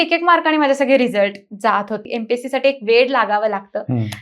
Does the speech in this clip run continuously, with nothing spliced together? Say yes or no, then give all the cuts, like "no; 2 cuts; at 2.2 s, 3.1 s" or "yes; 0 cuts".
no; 1 cut; at 2.0 s